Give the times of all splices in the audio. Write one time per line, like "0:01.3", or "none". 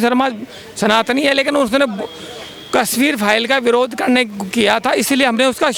none